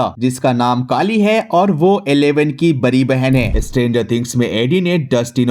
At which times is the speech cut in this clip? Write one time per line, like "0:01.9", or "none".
0:03.5